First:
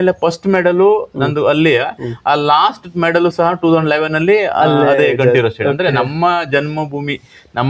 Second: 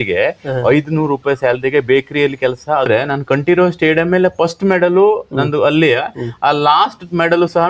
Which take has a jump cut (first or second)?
second